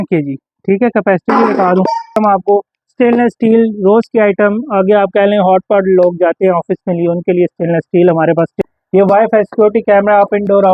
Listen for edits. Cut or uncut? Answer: cut